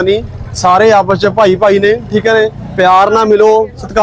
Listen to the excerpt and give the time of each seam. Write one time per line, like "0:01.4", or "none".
none